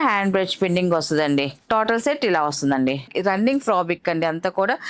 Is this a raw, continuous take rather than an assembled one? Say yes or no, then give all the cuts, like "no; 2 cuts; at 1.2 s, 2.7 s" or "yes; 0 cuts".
no; 1 cut; at 3.1 s